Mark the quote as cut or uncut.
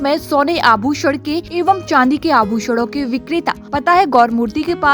cut